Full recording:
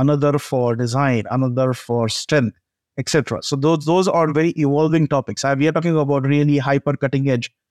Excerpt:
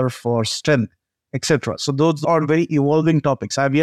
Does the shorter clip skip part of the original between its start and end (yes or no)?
yes